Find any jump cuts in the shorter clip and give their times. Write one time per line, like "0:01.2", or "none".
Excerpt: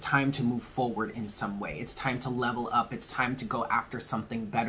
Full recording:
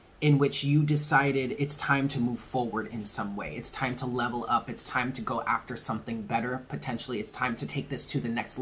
none